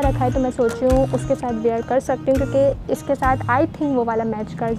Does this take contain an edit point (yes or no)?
no